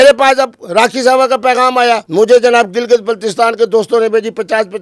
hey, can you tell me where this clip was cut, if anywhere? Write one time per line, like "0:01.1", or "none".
0:02.1